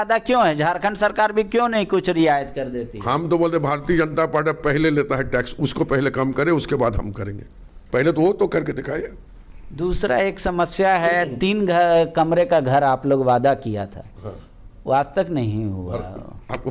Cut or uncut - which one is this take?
uncut